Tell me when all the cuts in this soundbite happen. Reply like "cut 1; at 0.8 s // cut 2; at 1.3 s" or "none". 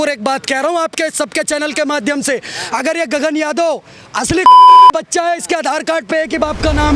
none